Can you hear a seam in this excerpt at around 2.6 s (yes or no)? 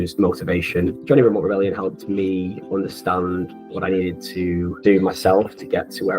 no